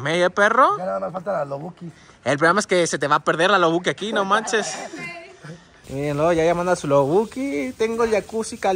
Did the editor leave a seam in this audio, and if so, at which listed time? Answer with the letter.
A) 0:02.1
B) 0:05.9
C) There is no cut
B